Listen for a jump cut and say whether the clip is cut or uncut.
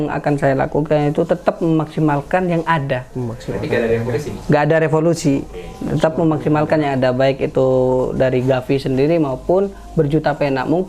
uncut